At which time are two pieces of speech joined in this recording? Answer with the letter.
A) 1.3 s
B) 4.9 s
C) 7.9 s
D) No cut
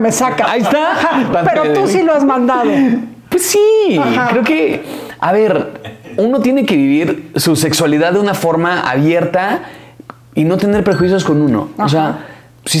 A